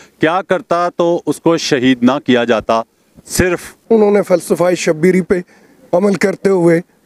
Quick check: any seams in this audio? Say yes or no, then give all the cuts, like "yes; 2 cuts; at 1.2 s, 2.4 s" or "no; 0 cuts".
yes; 1 cut; at 3.7 s